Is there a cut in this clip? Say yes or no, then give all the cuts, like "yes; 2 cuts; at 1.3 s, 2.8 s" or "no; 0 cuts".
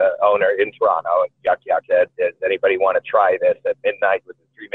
yes; 1 cut; at 1.8 s